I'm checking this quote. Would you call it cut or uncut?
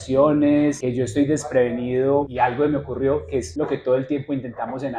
cut